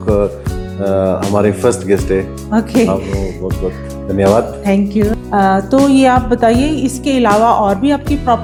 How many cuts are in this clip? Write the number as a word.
zero